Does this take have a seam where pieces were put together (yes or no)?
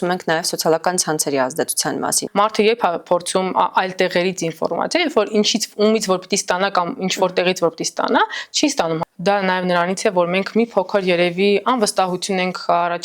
yes